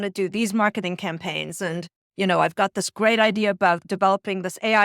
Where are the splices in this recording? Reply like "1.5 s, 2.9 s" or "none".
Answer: 3.9 s